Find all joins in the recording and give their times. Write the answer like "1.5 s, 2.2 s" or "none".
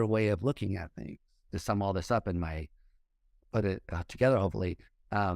1.4 s